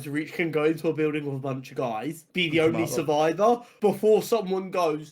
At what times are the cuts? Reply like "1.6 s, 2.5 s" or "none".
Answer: 2.2 s, 3.7 s